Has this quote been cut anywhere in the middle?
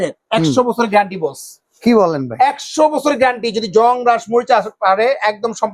no; 0 cuts

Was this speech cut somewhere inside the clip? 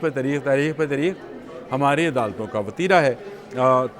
no; 0 cuts

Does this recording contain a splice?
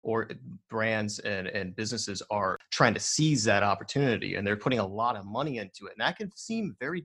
yes; 1 cut; at 2.6 s

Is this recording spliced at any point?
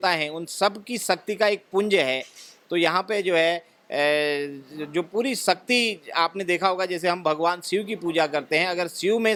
no; 0 cuts

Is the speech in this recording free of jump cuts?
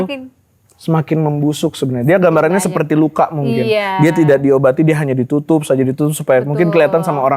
yes; 0 cuts

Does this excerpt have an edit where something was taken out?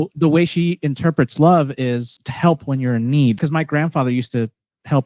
yes; 2 cuts; at 2.2 s, 3.4 s

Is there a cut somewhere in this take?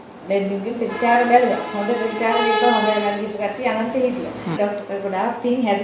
yes; 1 cut; at 4.6 s

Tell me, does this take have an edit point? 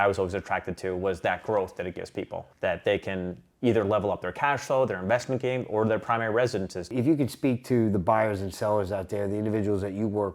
yes; 2 cuts; at 2.4 s, 6.9 s

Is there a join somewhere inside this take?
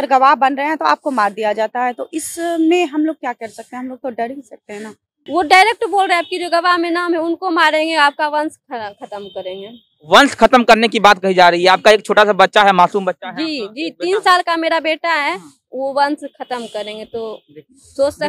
yes; 1 cut; at 5.1 s

